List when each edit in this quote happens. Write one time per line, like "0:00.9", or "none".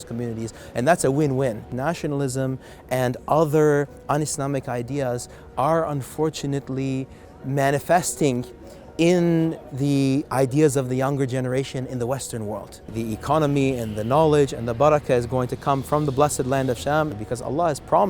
0:01.7
0:12.9
0:17.2